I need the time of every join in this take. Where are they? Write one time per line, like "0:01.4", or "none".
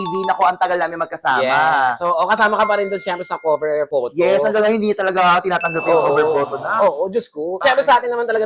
0:07.5